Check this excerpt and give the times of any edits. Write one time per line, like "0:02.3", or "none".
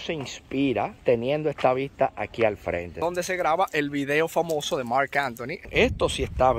0:00.9
0:03.0
0:05.7

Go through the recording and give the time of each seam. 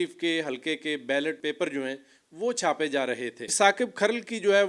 0:01.4
0:03.5

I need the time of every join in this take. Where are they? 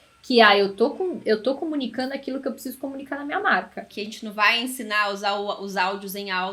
0:03.9

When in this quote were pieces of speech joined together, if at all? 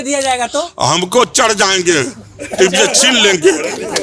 none

